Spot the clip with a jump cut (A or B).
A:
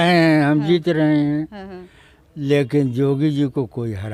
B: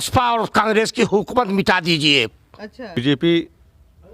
B